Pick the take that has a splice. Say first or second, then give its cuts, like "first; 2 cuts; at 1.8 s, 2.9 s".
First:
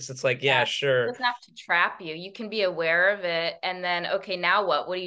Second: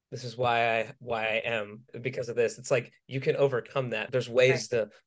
second; 2 cuts; at 1.0 s, 1.9 s